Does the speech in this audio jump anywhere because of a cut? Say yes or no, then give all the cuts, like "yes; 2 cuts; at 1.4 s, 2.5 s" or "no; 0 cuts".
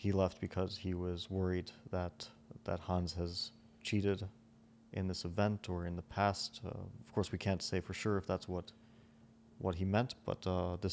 no; 0 cuts